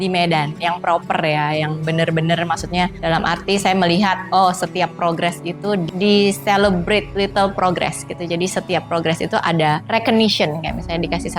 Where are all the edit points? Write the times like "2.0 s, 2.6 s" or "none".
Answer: 5.9 s, 7.1 s, 9.8 s